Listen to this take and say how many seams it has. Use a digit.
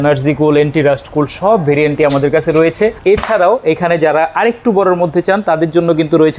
1